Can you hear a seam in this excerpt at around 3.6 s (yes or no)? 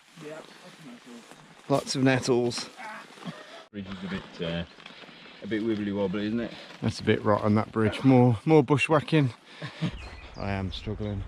yes